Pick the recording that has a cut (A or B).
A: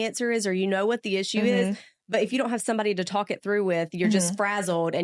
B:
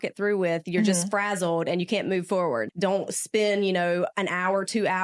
B